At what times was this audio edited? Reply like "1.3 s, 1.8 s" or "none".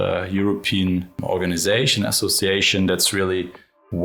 1.2 s